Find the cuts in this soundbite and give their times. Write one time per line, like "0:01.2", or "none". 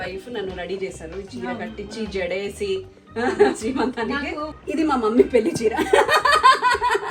0:04.5